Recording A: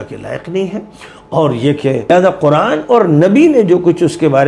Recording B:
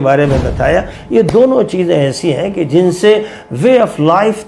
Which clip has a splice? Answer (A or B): A